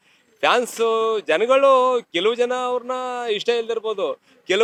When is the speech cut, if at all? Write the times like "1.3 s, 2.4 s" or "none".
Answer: none